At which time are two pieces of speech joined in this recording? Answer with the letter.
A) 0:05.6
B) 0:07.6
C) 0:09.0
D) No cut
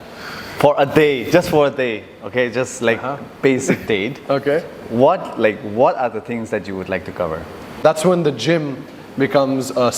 B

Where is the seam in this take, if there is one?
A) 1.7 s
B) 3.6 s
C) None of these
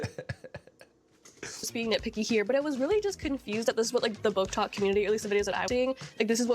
A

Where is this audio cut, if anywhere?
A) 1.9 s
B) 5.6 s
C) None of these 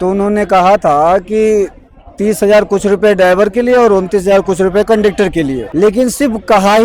B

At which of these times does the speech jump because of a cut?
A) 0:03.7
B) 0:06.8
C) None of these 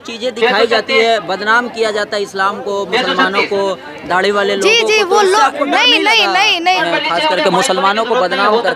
B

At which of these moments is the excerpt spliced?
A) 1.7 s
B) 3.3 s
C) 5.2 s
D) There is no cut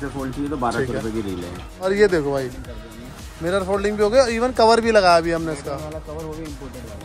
A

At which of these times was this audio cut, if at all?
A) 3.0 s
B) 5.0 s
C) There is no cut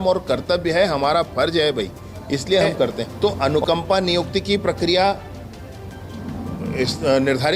A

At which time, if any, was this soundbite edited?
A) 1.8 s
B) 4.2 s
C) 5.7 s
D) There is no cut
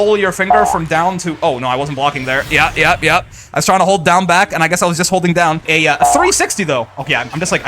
C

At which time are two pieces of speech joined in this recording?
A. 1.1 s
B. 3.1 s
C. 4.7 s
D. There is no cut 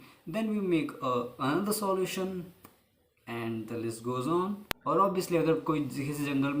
C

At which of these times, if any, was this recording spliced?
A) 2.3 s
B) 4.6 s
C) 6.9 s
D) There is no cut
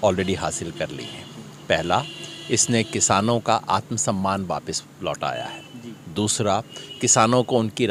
D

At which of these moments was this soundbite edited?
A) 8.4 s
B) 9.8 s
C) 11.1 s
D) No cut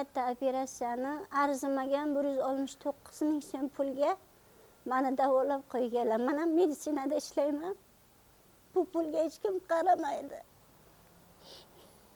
D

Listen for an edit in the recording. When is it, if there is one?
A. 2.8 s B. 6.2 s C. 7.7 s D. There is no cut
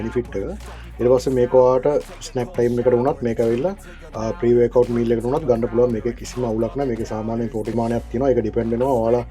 C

